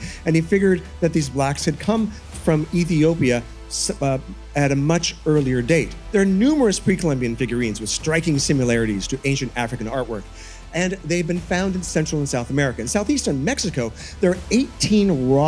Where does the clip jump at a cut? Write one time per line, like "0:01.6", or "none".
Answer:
none